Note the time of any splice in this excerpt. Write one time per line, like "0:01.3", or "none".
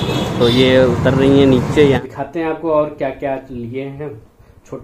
0:02.0

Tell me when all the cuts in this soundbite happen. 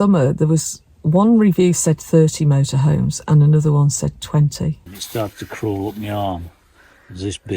0:05.0

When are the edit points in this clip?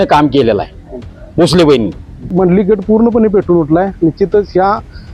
0:02.3

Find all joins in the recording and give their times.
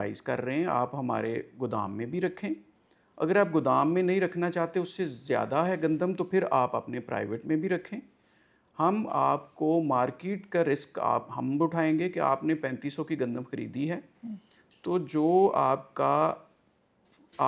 none

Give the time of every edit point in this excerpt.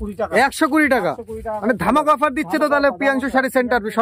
none

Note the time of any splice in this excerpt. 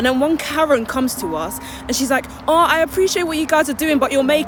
none

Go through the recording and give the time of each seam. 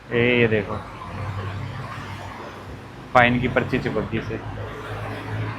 none

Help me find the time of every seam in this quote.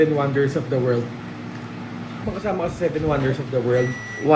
0:02.2

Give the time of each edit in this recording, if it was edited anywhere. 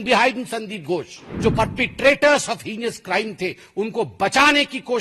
0:01.3

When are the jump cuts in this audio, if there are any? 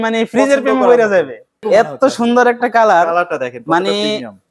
0:01.6

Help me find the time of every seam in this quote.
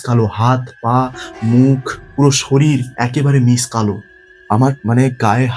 0:02.0
0:02.9
0:04.6

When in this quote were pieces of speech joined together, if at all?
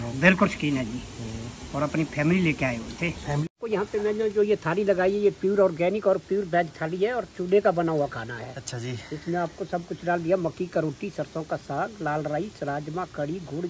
0:03.5

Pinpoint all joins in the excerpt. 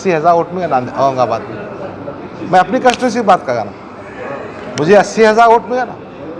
none

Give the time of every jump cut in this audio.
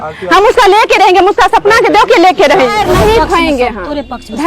0:02.7

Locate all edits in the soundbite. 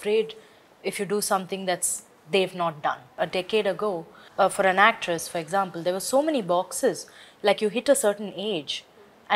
0:03.1

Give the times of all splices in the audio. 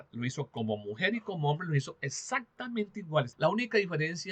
0:03.3

